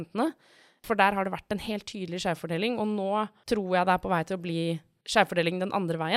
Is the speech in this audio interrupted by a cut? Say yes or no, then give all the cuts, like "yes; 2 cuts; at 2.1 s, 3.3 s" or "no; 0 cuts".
yes; 3 cuts; at 0.8 s, 3.4 s, 4.9 s